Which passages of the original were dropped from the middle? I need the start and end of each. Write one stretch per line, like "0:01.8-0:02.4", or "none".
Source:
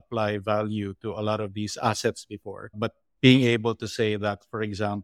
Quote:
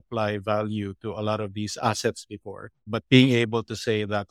0:02.8-0:02.9